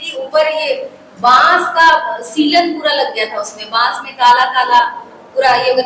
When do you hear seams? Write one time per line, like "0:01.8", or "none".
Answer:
none